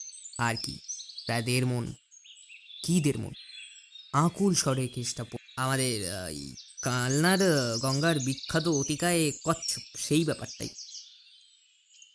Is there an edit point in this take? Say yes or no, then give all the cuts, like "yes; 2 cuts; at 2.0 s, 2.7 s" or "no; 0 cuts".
yes; 1 cut; at 5.4 s